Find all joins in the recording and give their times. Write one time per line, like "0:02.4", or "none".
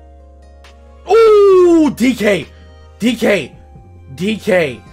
0:01.0